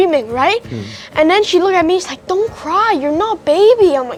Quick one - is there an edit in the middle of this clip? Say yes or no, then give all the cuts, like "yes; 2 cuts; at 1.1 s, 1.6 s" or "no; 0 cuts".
no; 0 cuts